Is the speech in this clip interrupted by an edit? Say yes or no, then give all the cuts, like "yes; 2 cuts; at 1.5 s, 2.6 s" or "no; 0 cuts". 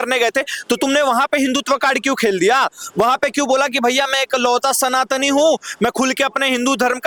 no; 0 cuts